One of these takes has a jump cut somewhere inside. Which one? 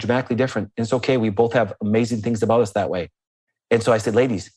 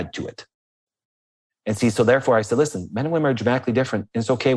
second; 1 cut; at 1.4 s

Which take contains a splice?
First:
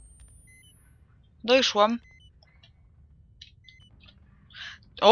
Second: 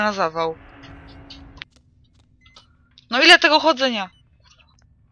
second; 1 cut; at 1.7 s

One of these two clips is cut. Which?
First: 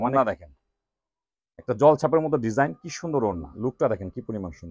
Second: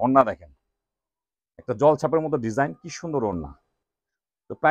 first; 1 cut; at 3.5 s

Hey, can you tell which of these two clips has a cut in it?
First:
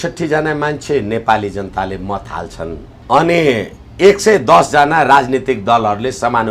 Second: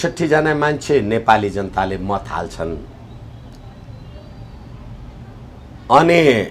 first; 1 cut; at 2.9 s

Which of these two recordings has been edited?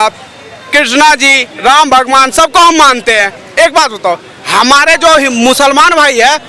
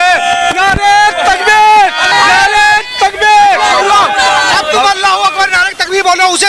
second; 1 cut; at 2.1 s

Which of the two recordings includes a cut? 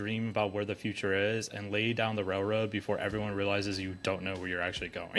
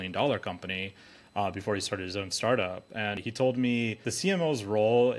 second; 2 cuts; at 3.2 s, 4.0 s

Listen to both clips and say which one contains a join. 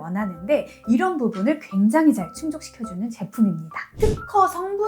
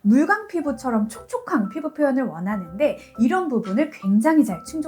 first; 1 cut; at 3.9 s

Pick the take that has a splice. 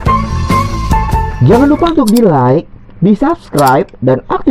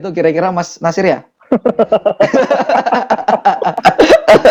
first; 1 cut; at 1.3 s

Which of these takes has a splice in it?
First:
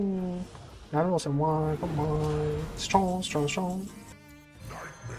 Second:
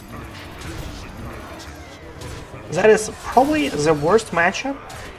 first; 1 cut; at 4.1 s

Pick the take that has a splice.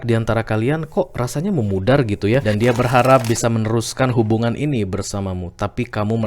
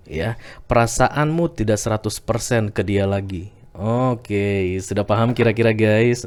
first; 1 cut; at 2.4 s

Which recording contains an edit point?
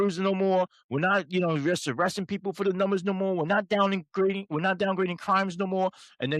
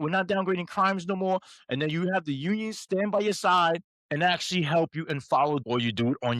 second; 2 cuts; at 3.9 s, 5.6 s

